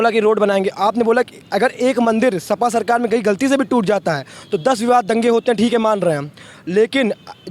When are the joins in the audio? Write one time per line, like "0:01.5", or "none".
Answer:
none